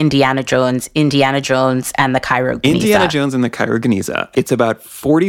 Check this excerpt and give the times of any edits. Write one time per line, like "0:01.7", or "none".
0:04.2